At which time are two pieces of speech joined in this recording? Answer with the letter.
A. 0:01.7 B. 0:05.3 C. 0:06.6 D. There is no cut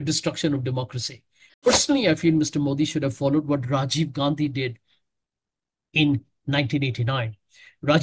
A